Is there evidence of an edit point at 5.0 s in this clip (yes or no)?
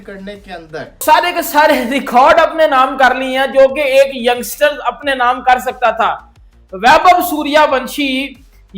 no